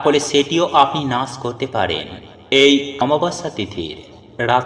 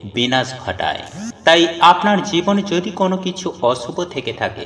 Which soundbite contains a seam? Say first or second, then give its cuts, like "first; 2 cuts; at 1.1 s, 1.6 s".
first; 1 cut; at 3.0 s